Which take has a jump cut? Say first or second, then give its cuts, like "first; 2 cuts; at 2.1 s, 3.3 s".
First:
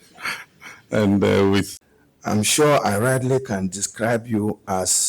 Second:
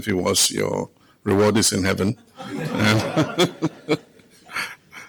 first; 1 cut; at 1.7 s